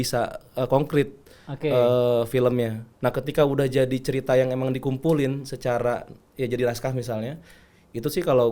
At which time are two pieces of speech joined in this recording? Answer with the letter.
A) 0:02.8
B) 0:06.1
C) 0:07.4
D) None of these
A